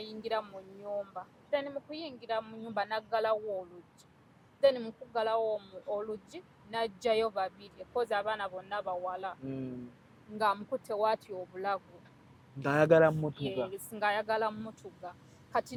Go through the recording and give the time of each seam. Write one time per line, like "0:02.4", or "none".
none